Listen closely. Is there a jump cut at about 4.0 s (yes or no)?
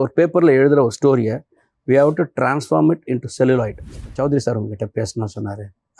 yes